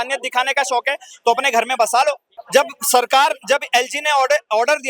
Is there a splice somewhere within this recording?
yes; 1 cut; at 2.3 s

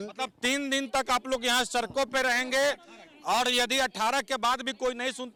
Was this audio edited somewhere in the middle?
no; 0 cuts

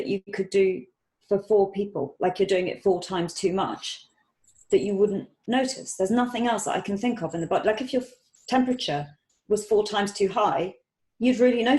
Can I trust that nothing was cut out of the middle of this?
yes; 0 cuts

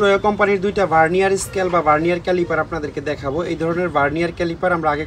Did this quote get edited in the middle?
no; 0 cuts

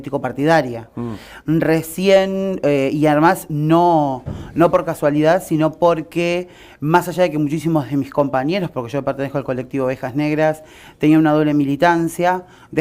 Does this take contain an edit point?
no; 0 cuts

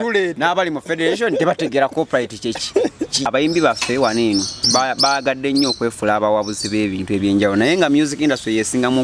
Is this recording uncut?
no; 1 cut; at 3.3 s

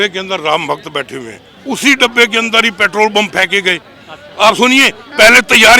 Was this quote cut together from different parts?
yes; 1 cut; at 1.5 s

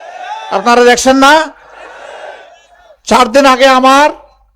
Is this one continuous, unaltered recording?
yes; 0 cuts

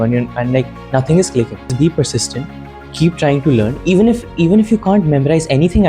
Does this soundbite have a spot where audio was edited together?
yes; 1 cut; at 1.7 s

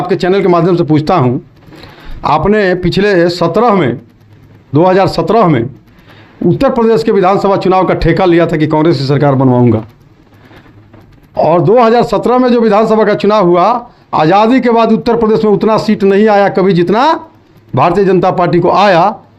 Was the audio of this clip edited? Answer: no; 0 cuts

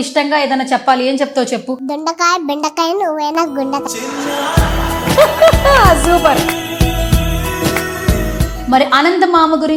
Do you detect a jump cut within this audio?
no; 0 cuts

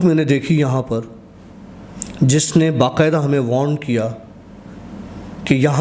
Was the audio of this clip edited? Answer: no; 0 cuts

